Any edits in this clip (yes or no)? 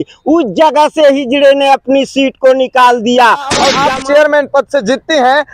yes